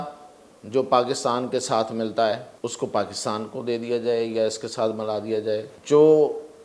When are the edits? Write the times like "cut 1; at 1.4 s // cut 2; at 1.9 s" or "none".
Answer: cut 1; at 2.5 s // cut 2; at 5.7 s